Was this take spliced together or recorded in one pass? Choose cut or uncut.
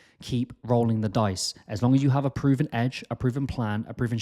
cut